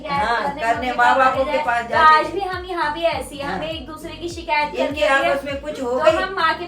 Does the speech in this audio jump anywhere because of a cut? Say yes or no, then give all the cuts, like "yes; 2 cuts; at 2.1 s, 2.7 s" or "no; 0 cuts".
no; 0 cuts